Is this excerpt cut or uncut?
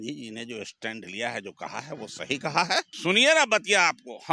uncut